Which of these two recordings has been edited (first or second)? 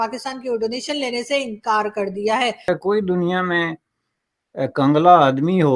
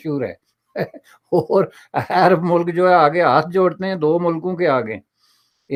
first